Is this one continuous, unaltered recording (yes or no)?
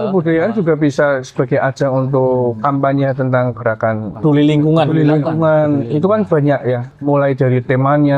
no